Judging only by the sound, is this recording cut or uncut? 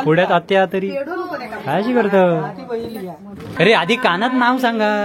cut